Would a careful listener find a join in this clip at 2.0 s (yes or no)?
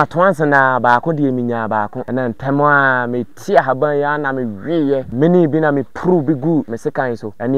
yes